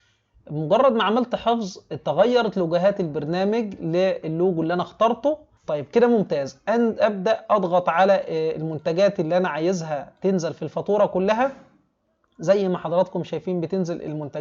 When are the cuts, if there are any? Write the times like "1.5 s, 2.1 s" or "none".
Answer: 5.5 s